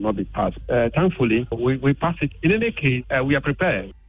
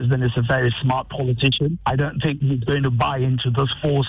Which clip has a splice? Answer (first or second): first